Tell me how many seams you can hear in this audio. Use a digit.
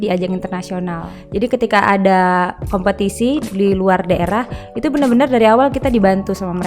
1